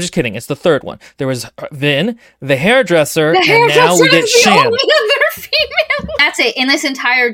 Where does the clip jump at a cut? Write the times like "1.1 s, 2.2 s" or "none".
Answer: 6.1 s

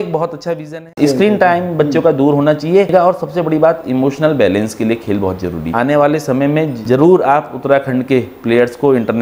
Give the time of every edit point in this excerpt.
0.9 s, 2.9 s, 5.7 s, 6.8 s

